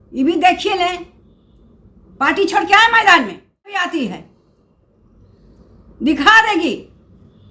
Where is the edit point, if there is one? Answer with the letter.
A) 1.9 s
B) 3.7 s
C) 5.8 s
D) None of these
B